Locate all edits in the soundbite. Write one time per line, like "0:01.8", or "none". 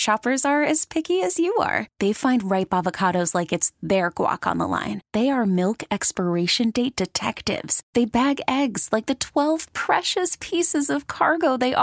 none